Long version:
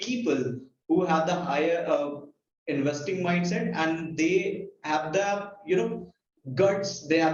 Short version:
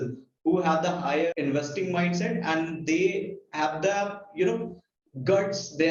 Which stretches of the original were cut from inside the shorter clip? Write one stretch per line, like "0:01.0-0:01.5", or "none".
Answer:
0:01.8-0:02.6